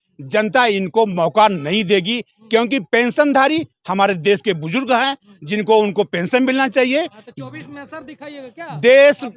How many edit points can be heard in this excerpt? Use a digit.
0